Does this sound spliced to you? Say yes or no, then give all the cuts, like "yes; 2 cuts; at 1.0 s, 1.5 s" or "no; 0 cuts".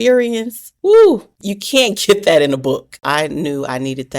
yes; 1 cut; at 3.0 s